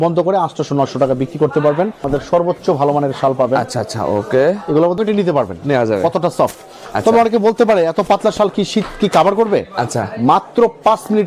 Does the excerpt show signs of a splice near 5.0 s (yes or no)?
yes